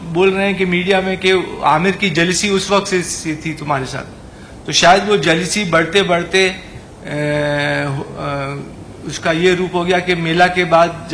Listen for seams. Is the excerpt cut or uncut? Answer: uncut